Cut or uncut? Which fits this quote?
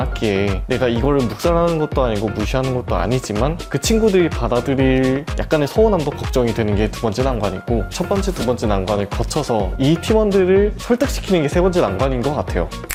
uncut